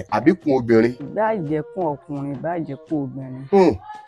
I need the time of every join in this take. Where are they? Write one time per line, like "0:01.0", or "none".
0:01.0